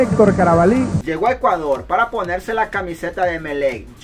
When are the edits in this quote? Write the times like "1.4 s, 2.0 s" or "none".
1.0 s

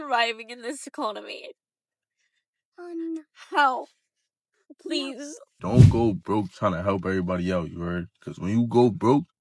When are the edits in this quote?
5.6 s

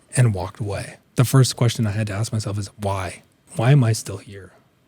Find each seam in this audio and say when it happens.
1.0 s, 3.4 s

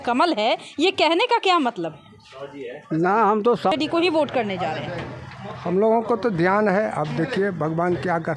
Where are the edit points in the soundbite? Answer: 3.7 s

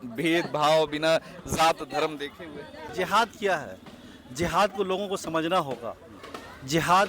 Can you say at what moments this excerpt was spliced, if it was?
2.8 s

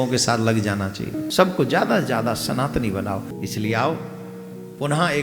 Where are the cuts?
1.2 s, 3.3 s

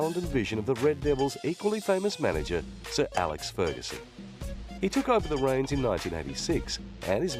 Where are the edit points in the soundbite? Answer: 5.9 s

